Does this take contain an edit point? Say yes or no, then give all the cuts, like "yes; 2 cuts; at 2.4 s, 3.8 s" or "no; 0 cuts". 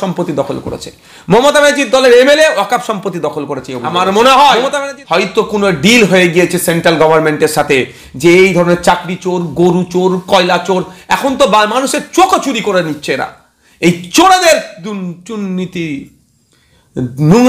yes; 1 cut; at 3.9 s